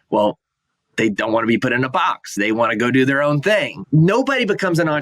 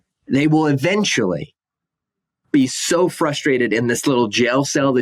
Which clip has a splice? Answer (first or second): first